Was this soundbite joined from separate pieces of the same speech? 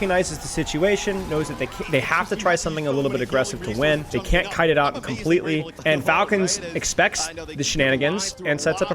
yes; 2 cuts; at 4.1 s, 5.7 s

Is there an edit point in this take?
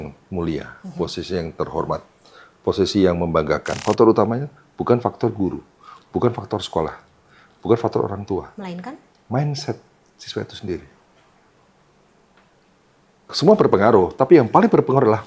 yes; 1 cut; at 3.8 s

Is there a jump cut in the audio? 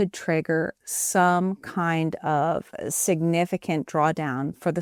no; 0 cuts

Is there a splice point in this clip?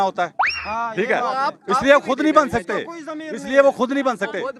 no; 0 cuts

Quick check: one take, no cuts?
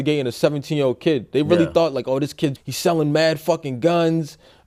yes; 0 cuts

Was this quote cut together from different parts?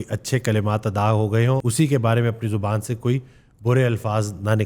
yes; 1 cut; at 1.6 s

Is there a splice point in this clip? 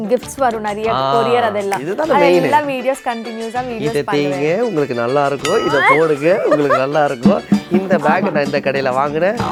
no; 0 cuts

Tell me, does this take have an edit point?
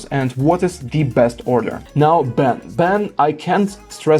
yes; 1 cut; at 1.8 s

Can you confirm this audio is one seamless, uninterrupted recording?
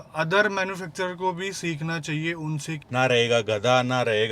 no; 1 cut; at 2.8 s

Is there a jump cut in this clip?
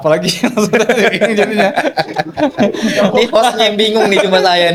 no; 0 cuts

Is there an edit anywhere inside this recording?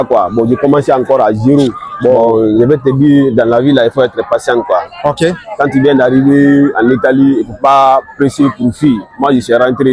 yes; 1 cut; at 2.2 s

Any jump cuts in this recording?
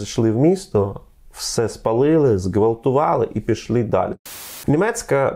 yes; 1 cut; at 4.2 s

